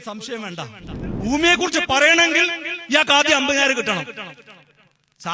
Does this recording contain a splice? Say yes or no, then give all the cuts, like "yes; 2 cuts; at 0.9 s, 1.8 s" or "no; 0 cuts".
yes; 1 cut; at 1.0 s